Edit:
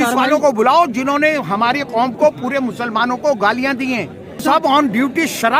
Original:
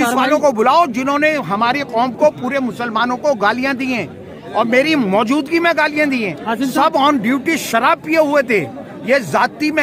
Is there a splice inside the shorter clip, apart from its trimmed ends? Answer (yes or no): yes